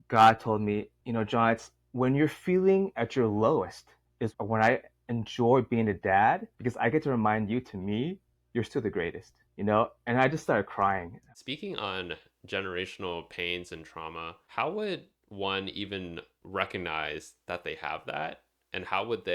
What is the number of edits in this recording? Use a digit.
3